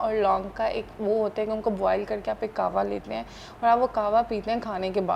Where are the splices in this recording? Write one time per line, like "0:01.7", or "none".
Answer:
none